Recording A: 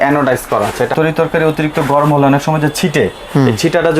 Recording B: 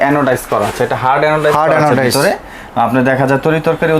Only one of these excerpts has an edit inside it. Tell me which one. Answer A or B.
A